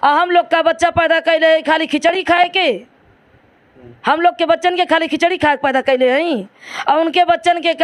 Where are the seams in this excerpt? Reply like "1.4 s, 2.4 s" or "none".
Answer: none